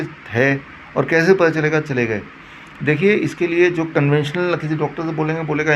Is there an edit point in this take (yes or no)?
no